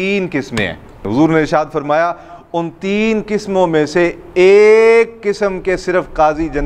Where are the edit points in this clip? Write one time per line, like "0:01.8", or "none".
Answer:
0:01.0